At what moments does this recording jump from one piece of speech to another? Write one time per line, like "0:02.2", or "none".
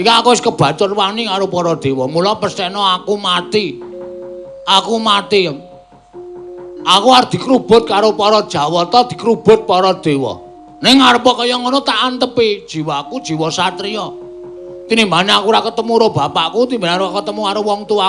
0:09.8